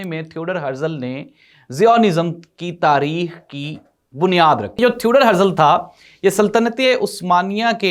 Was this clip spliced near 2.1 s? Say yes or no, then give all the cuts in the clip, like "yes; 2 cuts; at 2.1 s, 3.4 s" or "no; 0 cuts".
no; 1 cut; at 4.8 s